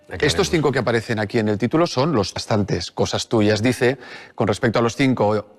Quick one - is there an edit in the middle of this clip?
no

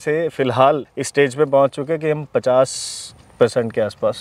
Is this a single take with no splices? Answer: no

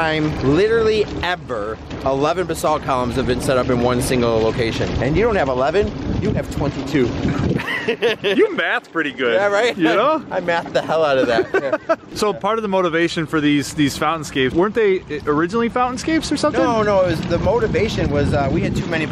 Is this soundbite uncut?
no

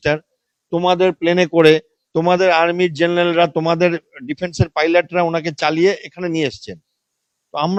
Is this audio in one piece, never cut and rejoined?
yes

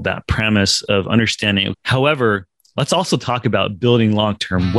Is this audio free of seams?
no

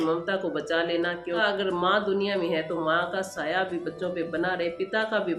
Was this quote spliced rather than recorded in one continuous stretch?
yes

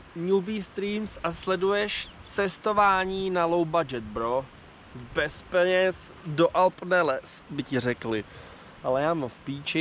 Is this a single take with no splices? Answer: yes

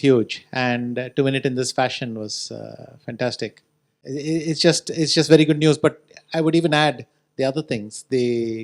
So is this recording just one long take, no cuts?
yes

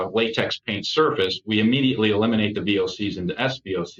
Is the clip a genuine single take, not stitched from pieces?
yes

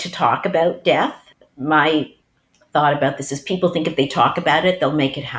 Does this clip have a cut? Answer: yes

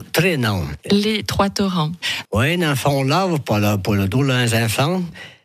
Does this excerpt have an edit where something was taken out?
yes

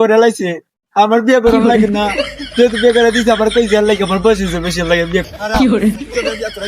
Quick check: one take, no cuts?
no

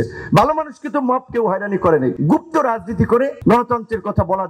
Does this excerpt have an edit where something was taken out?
yes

